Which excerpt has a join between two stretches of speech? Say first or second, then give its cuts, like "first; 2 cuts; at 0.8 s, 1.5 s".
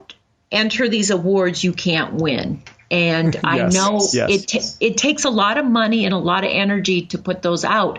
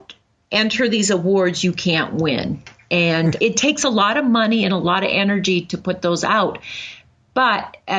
second; 1 cut; at 3.4 s